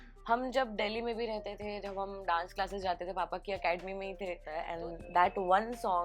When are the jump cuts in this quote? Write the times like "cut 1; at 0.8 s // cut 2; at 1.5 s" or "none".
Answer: cut 1; at 4.7 s